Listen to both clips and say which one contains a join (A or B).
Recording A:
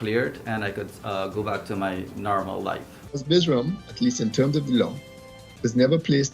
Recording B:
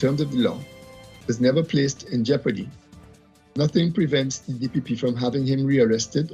A